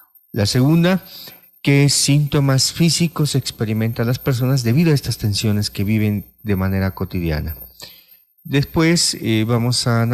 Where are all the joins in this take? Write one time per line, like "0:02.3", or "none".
none